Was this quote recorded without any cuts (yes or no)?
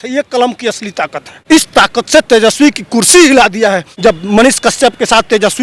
no